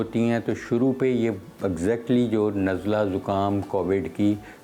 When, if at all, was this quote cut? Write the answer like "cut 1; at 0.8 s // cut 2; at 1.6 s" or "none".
none